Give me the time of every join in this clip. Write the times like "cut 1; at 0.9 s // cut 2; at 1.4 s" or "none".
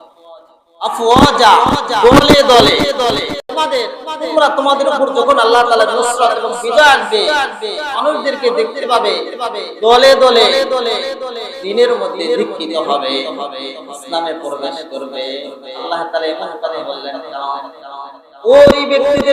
cut 1; at 3.5 s